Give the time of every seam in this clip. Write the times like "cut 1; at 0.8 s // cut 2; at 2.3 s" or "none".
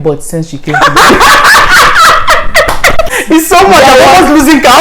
cut 1; at 3.1 s